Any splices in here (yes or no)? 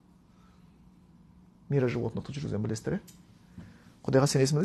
no